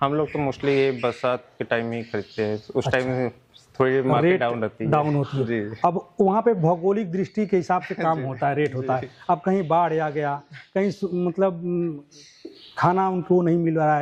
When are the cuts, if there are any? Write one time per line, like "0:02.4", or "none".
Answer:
none